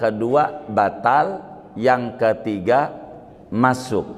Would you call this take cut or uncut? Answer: uncut